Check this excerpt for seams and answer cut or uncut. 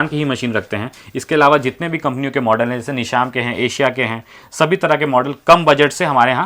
uncut